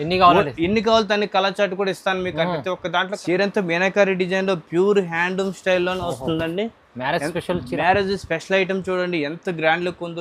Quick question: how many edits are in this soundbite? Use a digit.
1